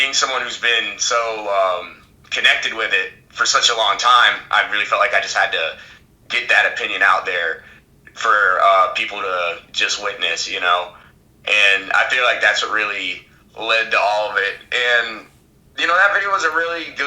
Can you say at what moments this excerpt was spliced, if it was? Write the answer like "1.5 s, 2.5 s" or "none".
none